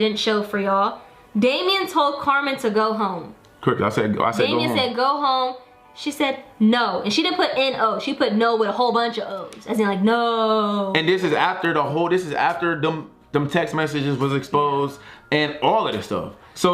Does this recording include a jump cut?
no; 0 cuts

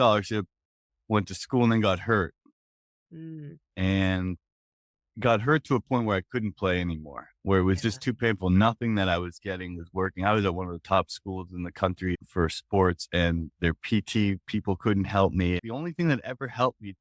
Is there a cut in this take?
yes; 2 cuts; at 12.2 s, 15.6 s

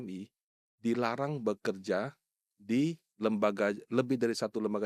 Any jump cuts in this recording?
no; 0 cuts

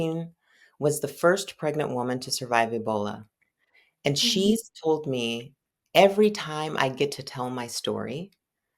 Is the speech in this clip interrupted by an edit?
no; 0 cuts

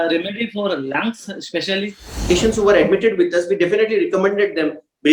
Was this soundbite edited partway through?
yes; 1 cut; at 2.3 s

